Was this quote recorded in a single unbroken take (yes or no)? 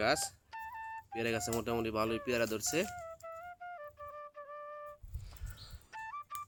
yes